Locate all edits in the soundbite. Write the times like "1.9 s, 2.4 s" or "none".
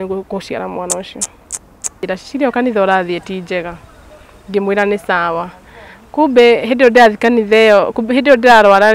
2.0 s

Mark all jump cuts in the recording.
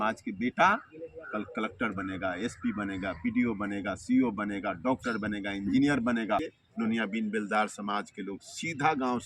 6.5 s

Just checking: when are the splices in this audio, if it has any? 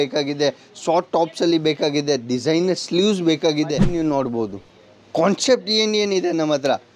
3.9 s

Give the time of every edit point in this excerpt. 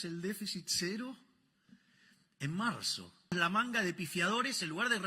3.3 s

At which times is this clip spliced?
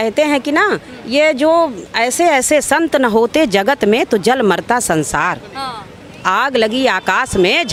none

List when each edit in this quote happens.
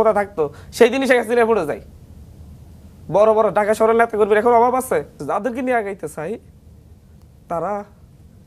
5.1 s

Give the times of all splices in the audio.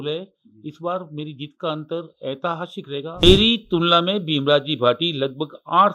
3.2 s

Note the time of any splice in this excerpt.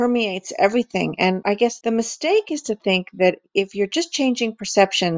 1.4 s

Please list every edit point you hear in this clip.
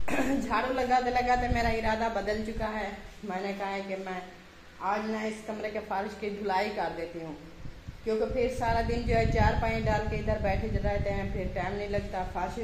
none

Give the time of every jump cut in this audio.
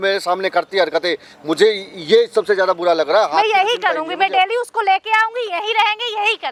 none

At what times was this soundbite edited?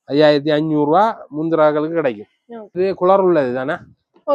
2.8 s

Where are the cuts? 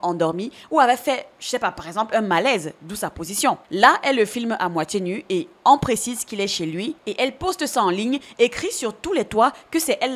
3.6 s

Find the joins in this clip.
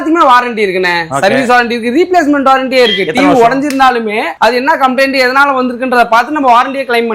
none

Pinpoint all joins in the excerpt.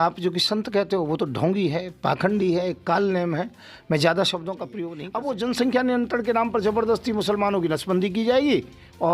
4.7 s

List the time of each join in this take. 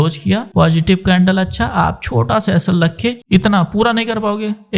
none

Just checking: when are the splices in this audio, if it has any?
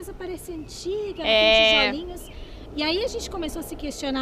none

